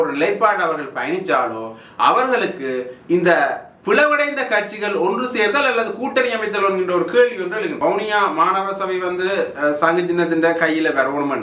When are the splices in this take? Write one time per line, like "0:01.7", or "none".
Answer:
0:07.7